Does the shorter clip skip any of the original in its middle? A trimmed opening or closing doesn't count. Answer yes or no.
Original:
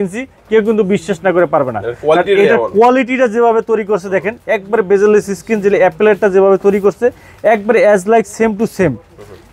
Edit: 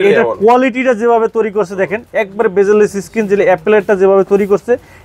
no